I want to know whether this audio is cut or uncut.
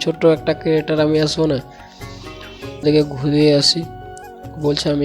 cut